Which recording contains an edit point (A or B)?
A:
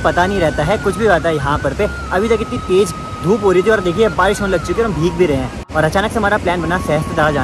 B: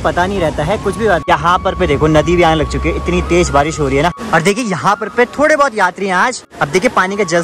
B